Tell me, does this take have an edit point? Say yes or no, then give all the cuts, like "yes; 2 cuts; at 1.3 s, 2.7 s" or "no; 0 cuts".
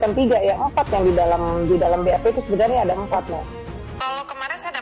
yes; 1 cut; at 3.9 s